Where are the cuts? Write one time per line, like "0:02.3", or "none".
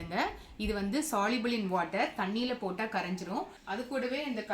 0:03.6